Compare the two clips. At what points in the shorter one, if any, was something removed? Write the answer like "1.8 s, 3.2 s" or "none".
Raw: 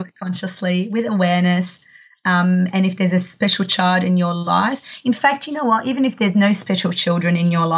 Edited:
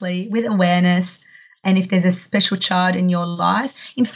1.6 s